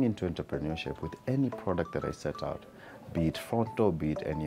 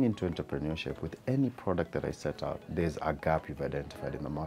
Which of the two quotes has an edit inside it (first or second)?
second